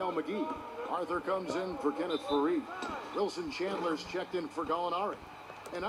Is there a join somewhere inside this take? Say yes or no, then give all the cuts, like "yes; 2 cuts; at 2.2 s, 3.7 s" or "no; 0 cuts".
no; 0 cuts